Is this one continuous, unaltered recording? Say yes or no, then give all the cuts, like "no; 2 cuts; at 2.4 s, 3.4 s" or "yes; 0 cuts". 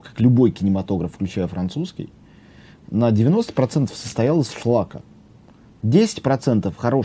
yes; 0 cuts